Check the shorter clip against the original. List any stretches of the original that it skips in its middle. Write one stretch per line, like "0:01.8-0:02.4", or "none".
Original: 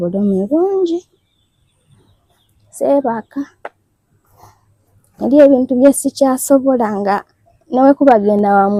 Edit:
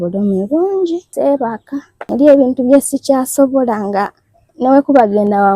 0:01.1-0:02.7
0:03.6-0:05.1